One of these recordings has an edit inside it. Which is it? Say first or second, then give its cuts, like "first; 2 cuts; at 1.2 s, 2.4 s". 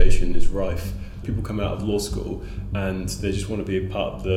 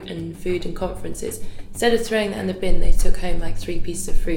first; 1 cut; at 1.2 s